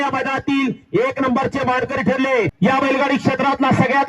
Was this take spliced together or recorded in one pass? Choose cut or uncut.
cut